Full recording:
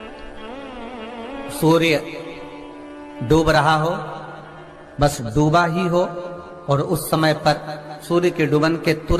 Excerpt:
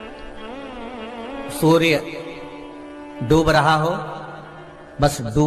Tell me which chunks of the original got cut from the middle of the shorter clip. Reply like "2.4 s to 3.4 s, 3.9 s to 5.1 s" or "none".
none